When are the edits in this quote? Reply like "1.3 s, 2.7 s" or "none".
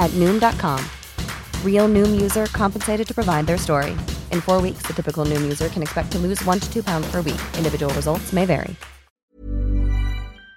9.3 s